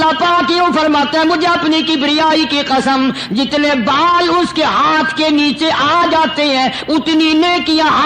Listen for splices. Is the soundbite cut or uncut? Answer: uncut